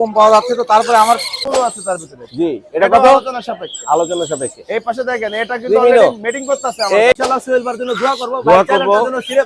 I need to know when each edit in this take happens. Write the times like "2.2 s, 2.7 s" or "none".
1.4 s, 7.1 s